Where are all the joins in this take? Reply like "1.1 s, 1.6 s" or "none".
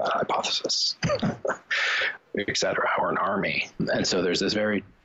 2.0 s, 3.8 s